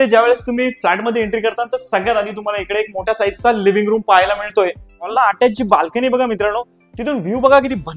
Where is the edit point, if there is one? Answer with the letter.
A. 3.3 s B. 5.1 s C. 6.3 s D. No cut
B